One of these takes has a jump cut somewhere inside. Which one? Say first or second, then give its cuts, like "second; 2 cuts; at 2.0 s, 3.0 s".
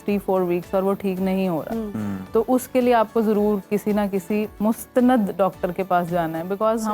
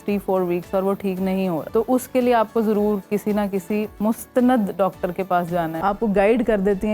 second; 2 cuts; at 1.6 s, 5.7 s